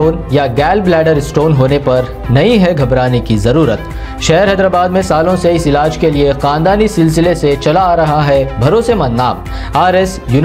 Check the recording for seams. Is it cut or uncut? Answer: uncut